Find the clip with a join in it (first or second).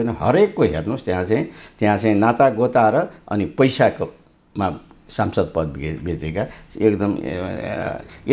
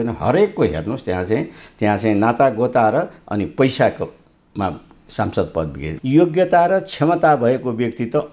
second